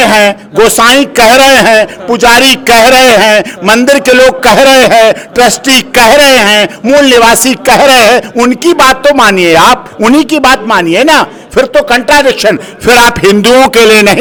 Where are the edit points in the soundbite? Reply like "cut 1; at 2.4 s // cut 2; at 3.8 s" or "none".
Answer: none